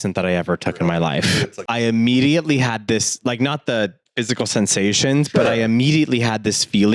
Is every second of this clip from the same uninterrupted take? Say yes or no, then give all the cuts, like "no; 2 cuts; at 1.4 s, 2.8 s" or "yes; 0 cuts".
no; 1 cut; at 1.6 s